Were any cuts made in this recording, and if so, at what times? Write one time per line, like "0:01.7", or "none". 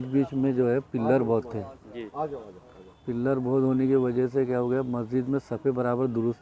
none